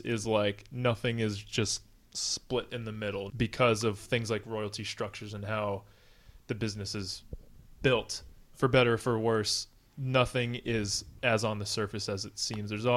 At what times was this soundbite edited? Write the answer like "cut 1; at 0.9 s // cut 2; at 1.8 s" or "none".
cut 1; at 3.3 s // cut 2; at 8.5 s // cut 3; at 11.1 s

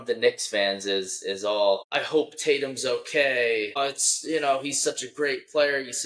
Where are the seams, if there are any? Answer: cut 1; at 1.9 s // cut 2; at 3.8 s

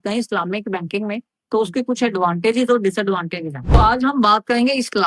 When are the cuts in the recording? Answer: cut 1; at 3.8 s

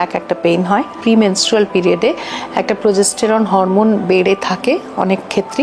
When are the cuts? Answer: cut 1; at 1.0 s

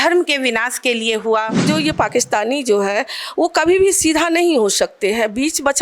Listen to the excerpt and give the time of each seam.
cut 1; at 1.6 s

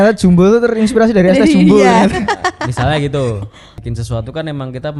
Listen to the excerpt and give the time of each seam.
cut 1; at 3.8 s

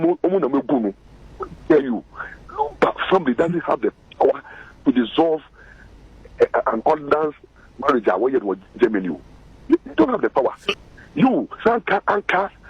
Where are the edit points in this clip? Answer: cut 1; at 10.7 s

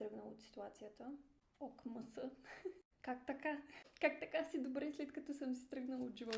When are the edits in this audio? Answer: cut 1; at 1.4 s // cut 2; at 2.9 s // cut 3; at 3.7 s

